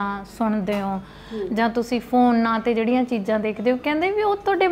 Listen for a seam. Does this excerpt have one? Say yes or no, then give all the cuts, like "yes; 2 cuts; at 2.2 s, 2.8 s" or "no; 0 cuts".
no; 0 cuts